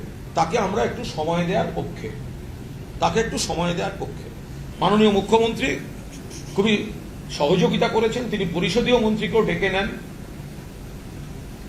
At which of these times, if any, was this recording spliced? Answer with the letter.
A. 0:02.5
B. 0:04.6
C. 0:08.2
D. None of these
B